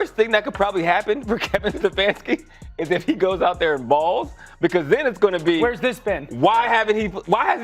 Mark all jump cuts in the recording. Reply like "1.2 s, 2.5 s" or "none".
none